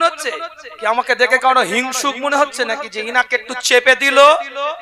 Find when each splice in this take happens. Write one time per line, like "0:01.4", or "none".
none